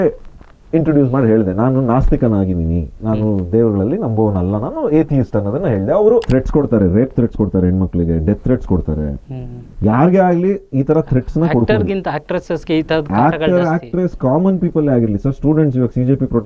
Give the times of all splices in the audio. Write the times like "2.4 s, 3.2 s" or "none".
6.3 s